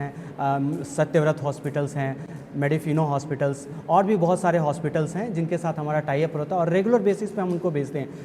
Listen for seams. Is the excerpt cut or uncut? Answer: uncut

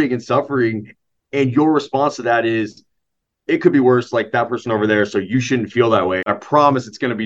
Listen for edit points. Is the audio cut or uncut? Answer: cut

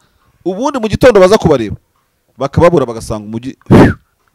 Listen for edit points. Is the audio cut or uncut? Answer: uncut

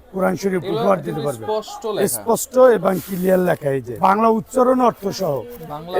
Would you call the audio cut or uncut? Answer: cut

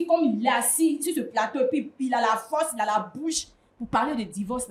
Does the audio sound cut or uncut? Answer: uncut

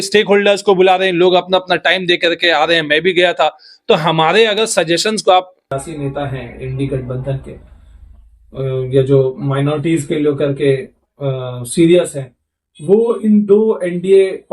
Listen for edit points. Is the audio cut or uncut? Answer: cut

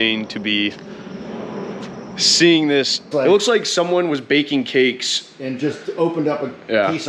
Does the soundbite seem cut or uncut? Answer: cut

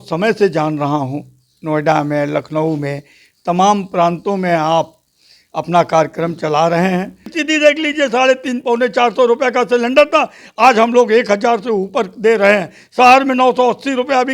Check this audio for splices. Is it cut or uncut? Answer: cut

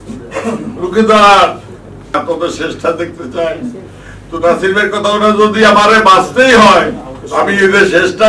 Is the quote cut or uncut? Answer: cut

